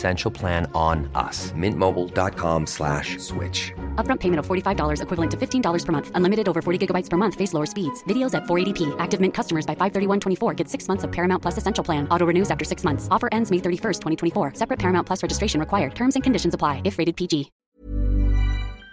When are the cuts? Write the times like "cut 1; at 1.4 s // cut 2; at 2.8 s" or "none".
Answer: cut 1; at 17.6 s